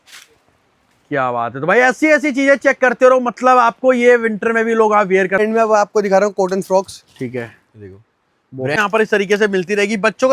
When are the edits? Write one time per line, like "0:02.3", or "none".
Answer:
0:05.4
0:08.8